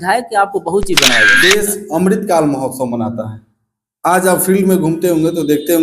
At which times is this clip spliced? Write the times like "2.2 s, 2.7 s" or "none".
1.2 s